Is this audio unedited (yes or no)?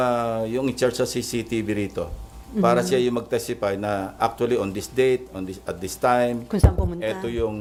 yes